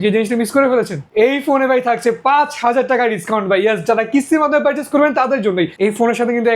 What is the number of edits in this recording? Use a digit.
2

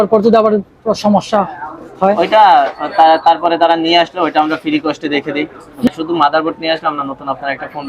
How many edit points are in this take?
1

